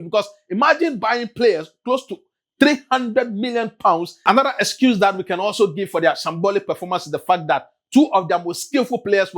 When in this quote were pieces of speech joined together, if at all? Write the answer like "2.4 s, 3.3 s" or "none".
4.1 s

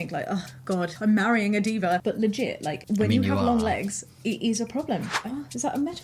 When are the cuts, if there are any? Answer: 0.9 s, 5.2 s

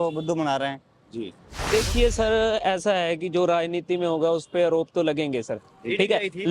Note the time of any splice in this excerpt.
1.5 s

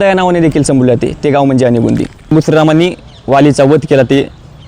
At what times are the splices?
2.3 s

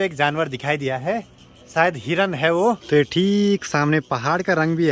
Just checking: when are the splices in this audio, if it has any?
none

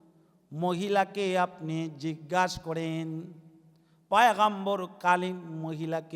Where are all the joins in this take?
none

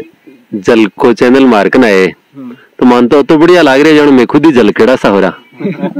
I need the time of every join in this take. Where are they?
none

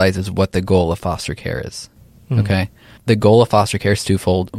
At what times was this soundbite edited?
2.9 s

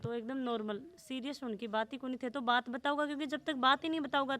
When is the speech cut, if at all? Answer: none

